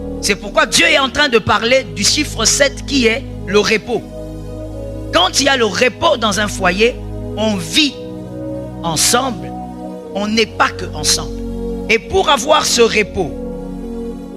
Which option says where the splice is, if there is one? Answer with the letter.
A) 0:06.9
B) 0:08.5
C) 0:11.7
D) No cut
C